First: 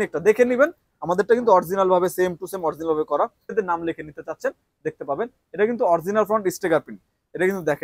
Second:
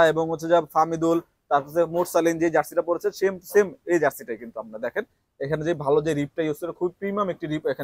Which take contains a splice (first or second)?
first